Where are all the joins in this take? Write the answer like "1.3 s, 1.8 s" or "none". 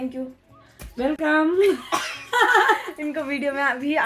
none